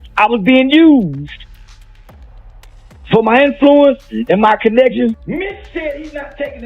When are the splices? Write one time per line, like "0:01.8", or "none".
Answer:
0:01.3
0:03.1
0:05.2